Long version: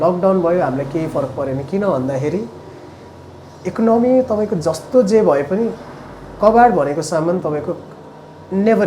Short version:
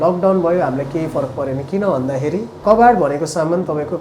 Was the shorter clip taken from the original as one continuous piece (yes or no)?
no